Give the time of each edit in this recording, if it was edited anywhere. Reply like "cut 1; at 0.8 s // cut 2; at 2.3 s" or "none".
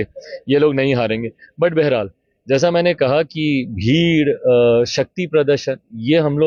none